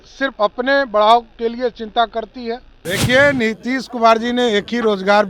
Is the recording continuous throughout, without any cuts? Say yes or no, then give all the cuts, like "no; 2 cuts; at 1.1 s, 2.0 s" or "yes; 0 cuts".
no; 1 cut; at 2.7 s